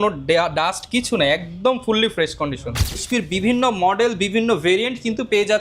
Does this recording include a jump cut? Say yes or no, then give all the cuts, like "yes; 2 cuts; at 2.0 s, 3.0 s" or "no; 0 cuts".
yes; 1 cut; at 3.0 s